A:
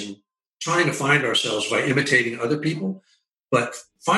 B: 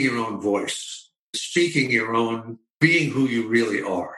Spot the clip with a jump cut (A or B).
B